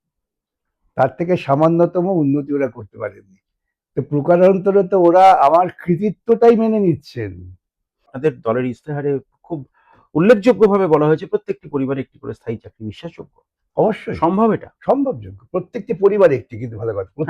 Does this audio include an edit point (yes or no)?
yes